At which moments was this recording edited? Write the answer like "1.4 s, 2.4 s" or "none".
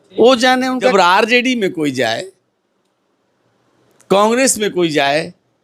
0.9 s